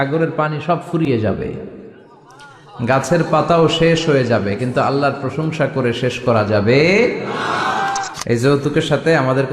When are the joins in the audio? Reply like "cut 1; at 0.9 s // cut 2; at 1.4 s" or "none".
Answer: cut 1; at 8.1 s